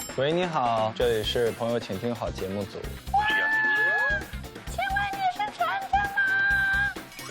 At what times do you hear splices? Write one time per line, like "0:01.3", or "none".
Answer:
0:00.9
0:02.9